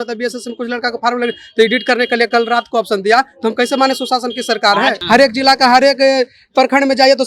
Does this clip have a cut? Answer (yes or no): yes